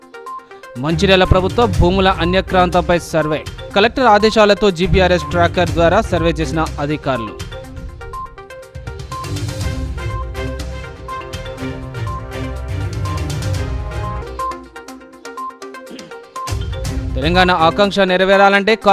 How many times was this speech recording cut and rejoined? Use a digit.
0